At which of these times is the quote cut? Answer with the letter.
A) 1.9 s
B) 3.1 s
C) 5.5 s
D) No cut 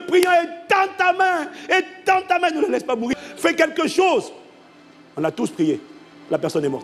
B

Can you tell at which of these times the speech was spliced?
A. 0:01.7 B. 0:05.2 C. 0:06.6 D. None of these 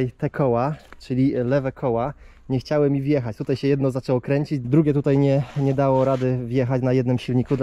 D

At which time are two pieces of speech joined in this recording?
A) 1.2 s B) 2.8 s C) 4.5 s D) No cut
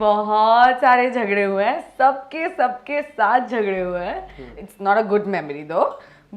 C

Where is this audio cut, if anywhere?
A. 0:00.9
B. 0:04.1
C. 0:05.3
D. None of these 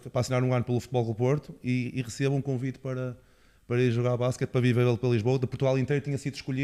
D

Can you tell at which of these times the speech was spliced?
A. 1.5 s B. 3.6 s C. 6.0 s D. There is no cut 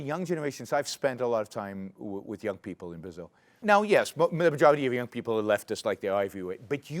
B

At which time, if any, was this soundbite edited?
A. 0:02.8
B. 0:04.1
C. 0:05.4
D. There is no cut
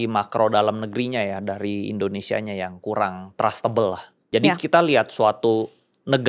B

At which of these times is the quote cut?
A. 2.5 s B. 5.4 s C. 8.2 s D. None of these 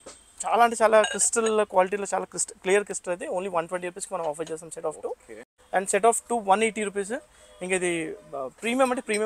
D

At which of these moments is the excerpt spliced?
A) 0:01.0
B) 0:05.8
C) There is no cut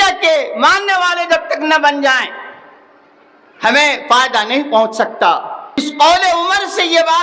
B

